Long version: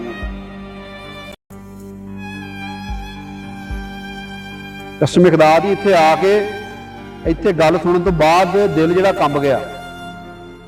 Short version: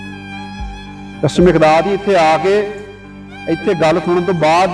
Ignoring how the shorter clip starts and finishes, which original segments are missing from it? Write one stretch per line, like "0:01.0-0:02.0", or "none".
0:03.5-0:05.0